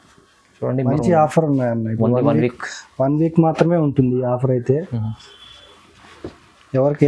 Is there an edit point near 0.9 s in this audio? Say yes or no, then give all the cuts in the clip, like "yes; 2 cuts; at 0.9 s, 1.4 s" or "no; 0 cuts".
yes; 1 cut; at 0.9 s